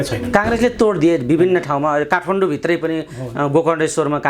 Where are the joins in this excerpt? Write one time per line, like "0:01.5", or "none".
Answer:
none